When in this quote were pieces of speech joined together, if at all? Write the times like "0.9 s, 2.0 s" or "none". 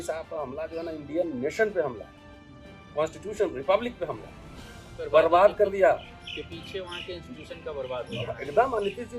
4.9 s

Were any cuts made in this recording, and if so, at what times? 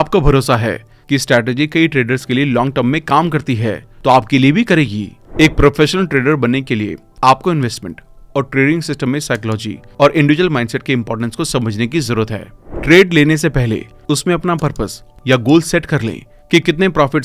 5.2 s, 12.5 s

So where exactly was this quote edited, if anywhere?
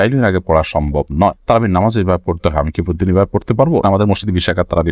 3.8 s

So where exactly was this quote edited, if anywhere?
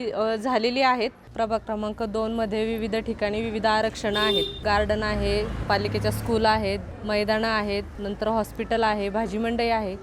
1.2 s, 4.6 s, 5.6 s, 6.9 s, 8.0 s

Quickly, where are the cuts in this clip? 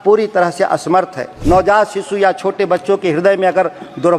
1.3 s

